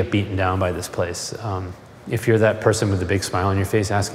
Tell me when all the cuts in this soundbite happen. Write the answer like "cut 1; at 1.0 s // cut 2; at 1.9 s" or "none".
cut 1; at 1.7 s